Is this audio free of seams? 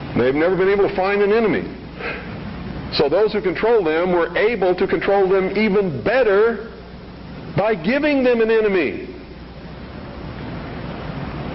no; 1 cut; at 10.2 s

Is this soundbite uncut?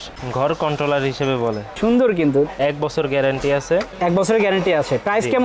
yes; 0 cuts

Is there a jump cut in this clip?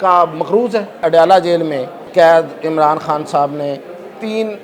yes; 2 cuts; at 1.0 s, 1.9 s

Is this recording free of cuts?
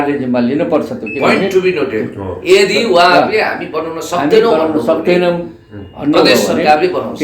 yes; 0 cuts

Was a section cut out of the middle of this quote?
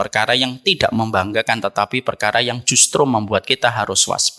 no; 0 cuts

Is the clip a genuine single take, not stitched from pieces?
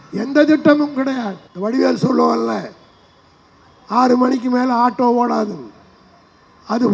no; 1 cut; at 1.5 s

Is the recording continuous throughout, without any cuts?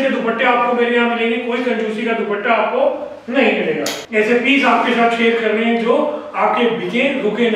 no; 1 cut; at 4.0 s

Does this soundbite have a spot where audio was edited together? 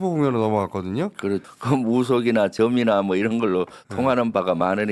yes; 1 cut; at 1.4 s

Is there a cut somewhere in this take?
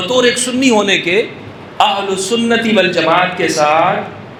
no; 0 cuts

